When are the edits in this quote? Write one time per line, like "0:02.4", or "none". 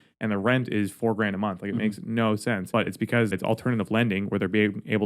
0:03.0